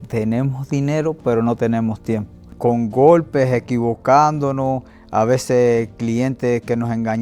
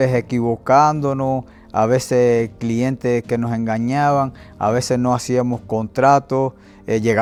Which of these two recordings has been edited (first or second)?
first